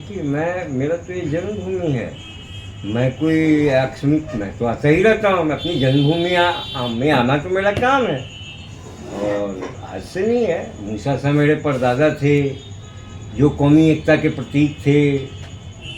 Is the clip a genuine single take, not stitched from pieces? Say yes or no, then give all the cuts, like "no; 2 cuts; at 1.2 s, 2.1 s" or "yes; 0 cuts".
yes; 0 cuts